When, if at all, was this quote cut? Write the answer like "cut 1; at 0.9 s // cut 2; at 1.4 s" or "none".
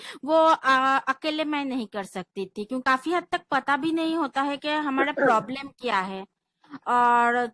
cut 1; at 2.8 s

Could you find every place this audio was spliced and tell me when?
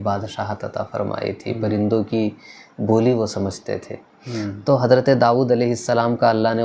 none

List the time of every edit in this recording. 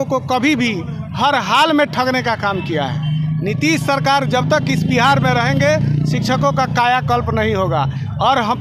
none

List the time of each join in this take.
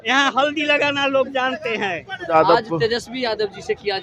cut 1; at 2.3 s

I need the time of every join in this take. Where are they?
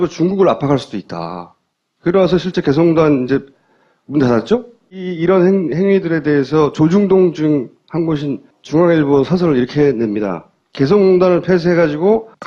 cut 1; at 8.0 s

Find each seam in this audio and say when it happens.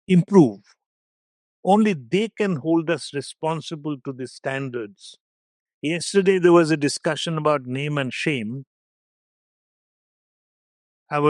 none

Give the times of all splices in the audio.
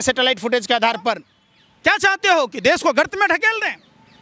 cut 1; at 1.3 s

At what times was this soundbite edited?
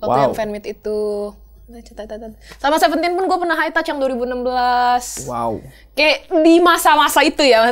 none

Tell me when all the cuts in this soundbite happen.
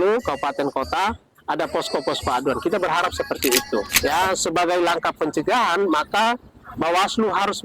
cut 1; at 3.9 s

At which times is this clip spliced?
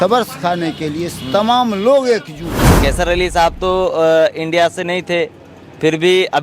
cut 1; at 2.8 s

